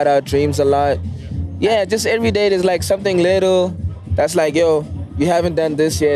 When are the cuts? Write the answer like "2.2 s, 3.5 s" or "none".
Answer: 1.1 s, 4.1 s, 5.0 s